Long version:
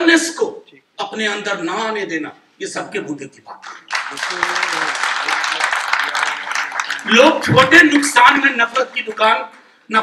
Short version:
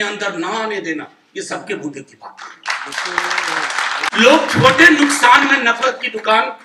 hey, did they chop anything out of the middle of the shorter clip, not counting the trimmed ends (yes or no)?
yes